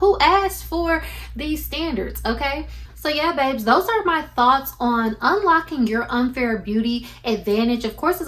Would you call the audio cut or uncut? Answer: uncut